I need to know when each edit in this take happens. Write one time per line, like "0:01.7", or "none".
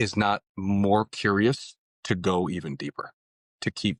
none